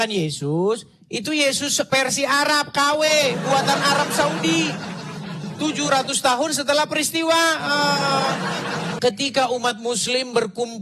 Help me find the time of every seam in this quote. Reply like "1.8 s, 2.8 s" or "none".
8.9 s